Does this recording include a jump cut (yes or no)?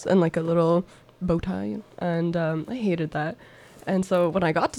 yes